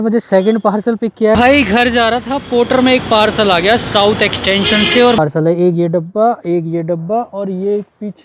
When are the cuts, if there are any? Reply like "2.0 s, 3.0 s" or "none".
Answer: 1.4 s, 5.2 s